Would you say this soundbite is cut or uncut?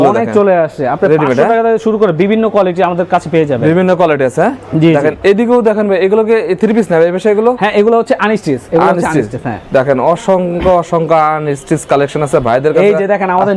uncut